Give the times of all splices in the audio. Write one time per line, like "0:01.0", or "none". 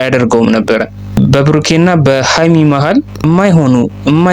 0:01.0
0:03.1